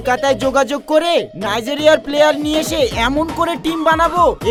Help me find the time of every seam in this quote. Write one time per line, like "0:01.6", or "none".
none